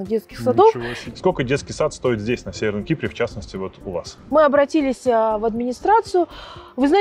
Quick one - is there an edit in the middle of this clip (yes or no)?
yes